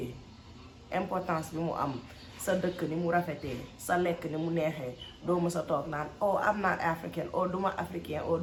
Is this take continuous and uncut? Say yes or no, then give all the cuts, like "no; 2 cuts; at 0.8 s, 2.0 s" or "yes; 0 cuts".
yes; 0 cuts